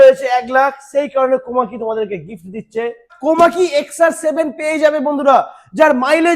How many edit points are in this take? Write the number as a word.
one